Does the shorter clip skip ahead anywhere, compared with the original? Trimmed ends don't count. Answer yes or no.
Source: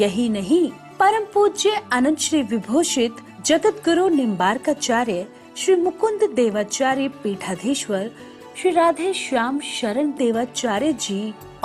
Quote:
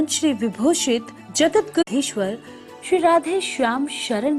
yes